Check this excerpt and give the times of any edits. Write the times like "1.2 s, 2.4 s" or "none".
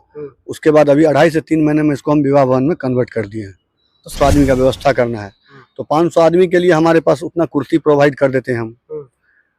4.1 s